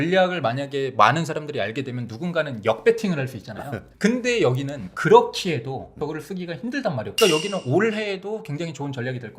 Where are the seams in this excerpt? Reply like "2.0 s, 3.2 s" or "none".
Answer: 6.0 s, 7.1 s